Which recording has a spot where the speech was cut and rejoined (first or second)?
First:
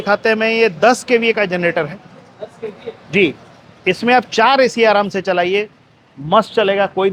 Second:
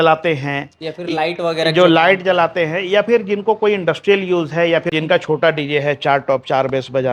second